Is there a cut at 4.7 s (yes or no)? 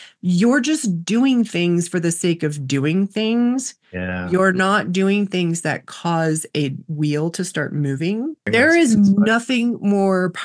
no